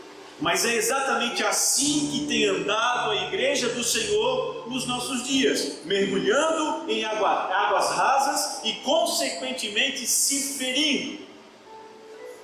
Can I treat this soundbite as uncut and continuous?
yes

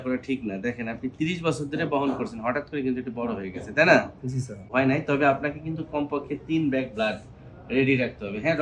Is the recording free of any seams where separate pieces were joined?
no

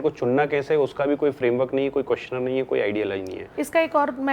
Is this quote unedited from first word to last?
no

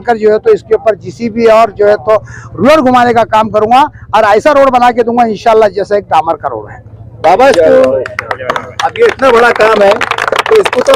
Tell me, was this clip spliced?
no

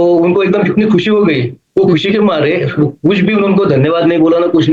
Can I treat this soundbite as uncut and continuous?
yes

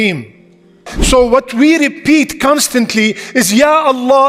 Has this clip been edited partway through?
yes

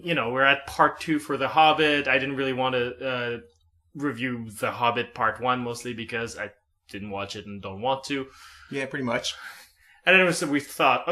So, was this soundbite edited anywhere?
no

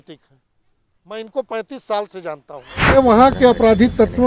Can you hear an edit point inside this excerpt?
yes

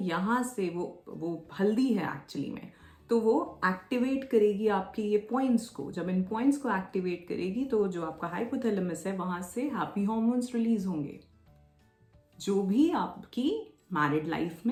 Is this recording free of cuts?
yes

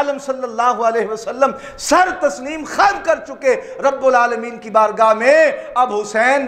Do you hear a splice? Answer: no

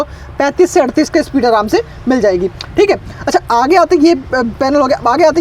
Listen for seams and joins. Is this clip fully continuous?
yes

